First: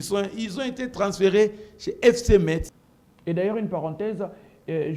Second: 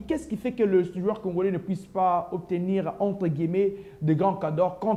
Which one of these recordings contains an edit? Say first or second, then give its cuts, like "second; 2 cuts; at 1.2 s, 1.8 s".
first; 1 cut; at 2.8 s